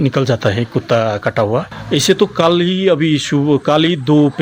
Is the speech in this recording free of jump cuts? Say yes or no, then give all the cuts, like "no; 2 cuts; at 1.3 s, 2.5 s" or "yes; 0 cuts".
yes; 0 cuts